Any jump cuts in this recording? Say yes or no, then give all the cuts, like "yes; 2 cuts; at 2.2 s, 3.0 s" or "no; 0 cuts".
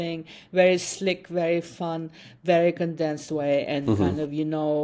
no; 0 cuts